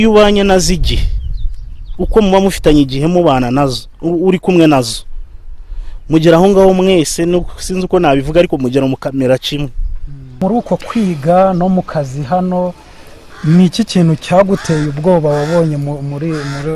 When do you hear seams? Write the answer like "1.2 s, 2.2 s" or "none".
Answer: 10.4 s